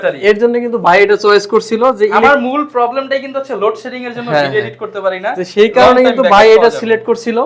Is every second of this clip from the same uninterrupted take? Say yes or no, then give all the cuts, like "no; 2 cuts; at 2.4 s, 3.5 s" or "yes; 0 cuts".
yes; 0 cuts